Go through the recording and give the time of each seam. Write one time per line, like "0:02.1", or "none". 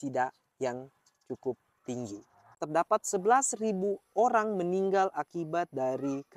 0:02.6

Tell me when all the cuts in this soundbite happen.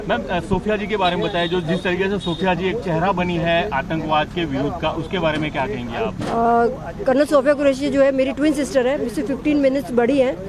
none

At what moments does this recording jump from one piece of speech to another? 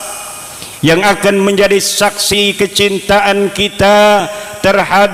none

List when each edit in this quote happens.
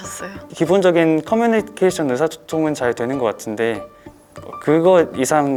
none

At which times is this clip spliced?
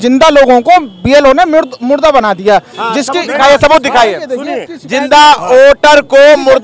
0:04.6

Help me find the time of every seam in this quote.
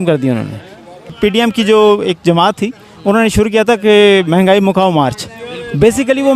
0:01.1

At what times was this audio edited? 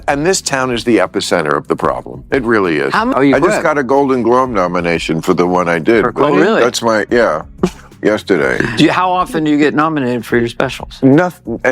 0:03.2

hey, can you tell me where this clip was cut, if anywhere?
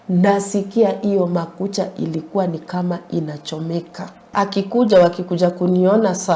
0:04.2

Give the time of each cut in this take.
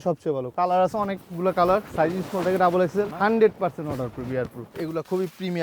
0:01.9
0:03.1
0:04.6

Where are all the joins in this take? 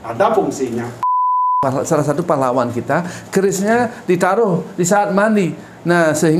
0:01.2

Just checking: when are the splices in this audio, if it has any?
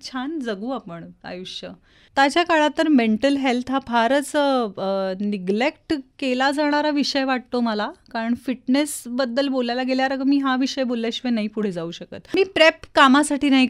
0:02.0
0:12.2

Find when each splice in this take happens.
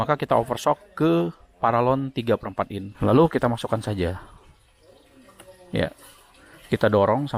0:02.8

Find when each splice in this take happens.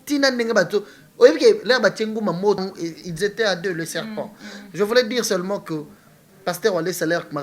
0:02.6

